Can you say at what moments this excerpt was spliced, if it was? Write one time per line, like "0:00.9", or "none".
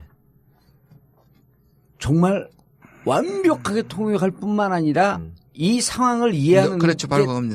none